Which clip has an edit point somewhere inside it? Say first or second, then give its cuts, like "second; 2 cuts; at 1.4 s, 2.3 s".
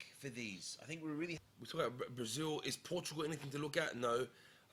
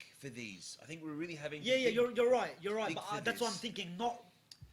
first; 1 cut; at 1.4 s